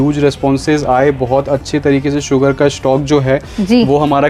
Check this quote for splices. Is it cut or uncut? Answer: uncut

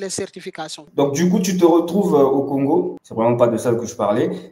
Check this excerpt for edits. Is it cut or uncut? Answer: cut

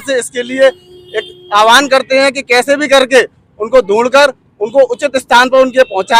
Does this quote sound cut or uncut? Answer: uncut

